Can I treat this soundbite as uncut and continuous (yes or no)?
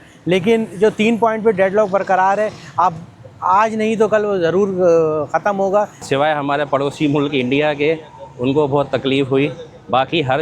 no